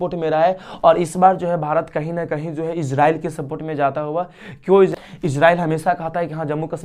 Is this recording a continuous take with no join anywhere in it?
no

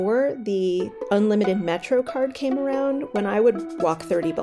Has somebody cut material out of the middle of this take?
yes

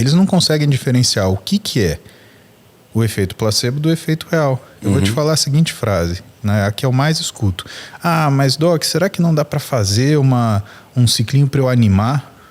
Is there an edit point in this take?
no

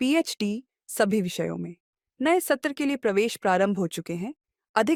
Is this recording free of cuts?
yes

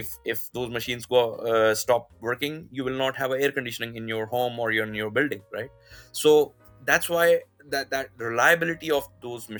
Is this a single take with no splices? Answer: yes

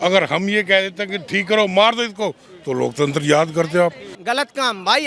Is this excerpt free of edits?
no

